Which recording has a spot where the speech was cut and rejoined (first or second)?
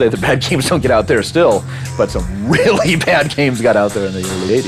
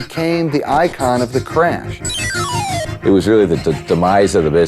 second